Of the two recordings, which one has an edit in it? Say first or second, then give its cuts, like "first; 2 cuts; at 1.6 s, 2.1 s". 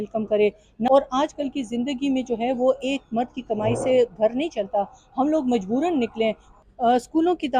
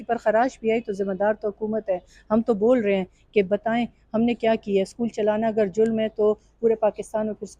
first; 2 cuts; at 0.9 s, 6.5 s